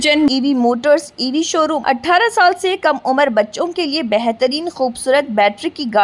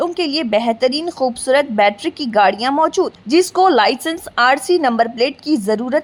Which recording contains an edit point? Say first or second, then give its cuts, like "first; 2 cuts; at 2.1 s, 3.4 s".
first; 1 cut; at 1.8 s